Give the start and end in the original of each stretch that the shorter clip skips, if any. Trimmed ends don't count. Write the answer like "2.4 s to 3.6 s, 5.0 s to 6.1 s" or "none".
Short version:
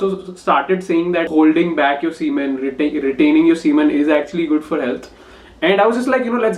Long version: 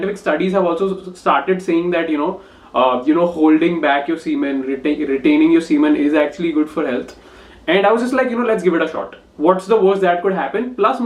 2.1 s to 3.3 s